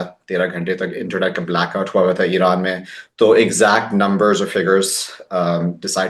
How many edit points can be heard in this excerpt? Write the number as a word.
zero